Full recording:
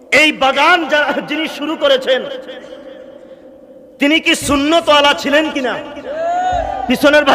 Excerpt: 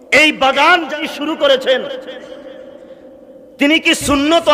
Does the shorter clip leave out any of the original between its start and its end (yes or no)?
yes